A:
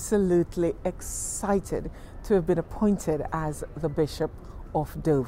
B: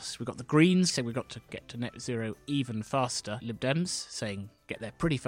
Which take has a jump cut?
B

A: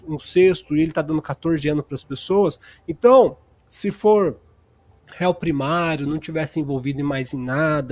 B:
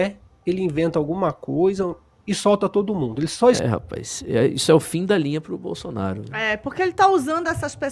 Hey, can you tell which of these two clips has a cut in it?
B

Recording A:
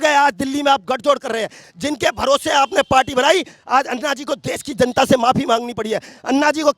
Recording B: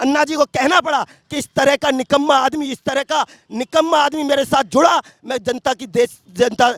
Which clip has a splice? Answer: A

